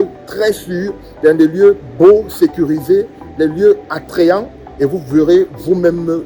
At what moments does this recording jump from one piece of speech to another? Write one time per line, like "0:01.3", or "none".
none